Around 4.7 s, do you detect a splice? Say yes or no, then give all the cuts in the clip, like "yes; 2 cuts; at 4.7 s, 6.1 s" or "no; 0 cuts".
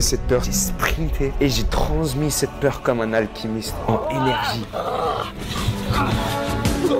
yes; 1 cut; at 4.7 s